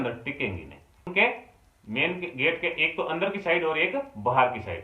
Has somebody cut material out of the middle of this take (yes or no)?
yes